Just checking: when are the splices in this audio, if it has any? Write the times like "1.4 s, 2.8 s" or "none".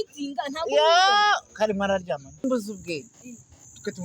2.4 s

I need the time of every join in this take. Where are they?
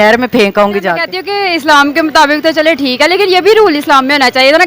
1.1 s

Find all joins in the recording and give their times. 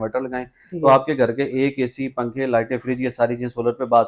none

